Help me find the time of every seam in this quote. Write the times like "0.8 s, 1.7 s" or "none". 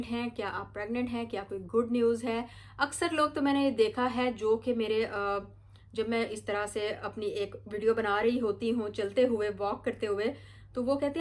none